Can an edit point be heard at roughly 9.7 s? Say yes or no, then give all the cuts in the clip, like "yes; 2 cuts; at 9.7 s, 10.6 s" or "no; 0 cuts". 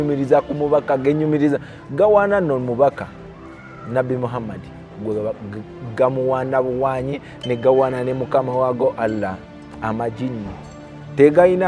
no; 0 cuts